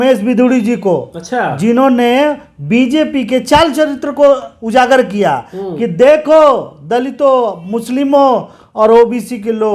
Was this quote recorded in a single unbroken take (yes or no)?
yes